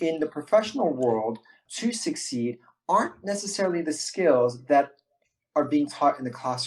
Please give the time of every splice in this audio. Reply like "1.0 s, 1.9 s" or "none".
1.7 s